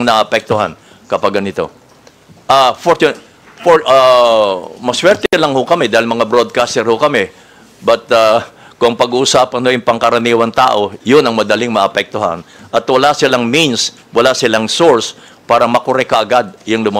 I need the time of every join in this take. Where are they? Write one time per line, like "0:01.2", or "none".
none